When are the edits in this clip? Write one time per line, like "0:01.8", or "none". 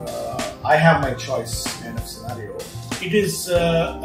0:02.9